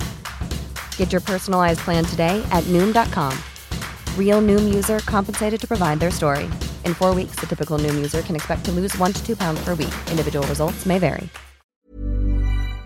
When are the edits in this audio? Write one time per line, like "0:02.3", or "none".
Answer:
0:11.7